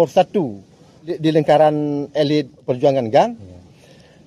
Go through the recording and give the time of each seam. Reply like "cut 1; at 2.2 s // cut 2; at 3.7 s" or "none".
cut 1; at 1.2 s // cut 2; at 2.6 s

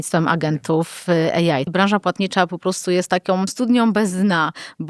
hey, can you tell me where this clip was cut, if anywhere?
cut 1; at 1.7 s // cut 2; at 3.5 s

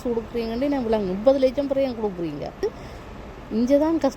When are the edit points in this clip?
cut 1; at 2.6 s

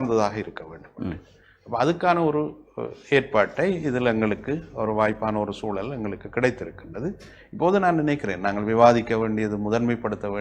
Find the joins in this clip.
none

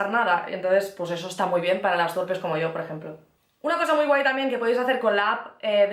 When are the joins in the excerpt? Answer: none

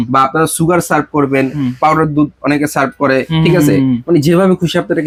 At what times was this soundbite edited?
none

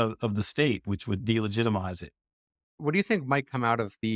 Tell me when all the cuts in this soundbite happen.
cut 1; at 2.7 s

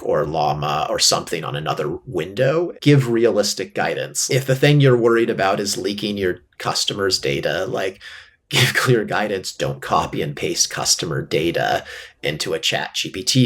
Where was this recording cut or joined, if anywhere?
cut 1; at 2.7 s // cut 2; at 4.1 s

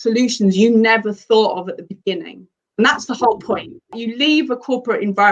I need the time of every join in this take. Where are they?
cut 1; at 4.0 s

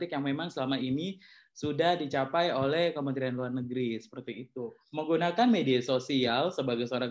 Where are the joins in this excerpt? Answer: cut 1; at 4.8 s

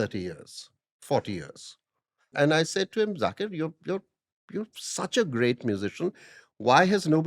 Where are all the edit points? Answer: cut 1; at 2.3 s

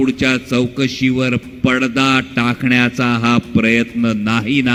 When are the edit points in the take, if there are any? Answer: none

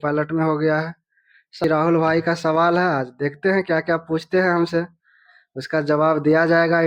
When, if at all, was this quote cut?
cut 1; at 1.6 s

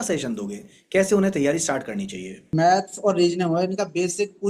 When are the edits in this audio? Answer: cut 1; at 2.5 s

